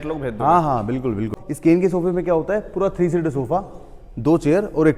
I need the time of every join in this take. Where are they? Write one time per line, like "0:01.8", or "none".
0:01.4